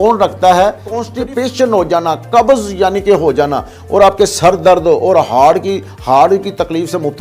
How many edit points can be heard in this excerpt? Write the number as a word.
one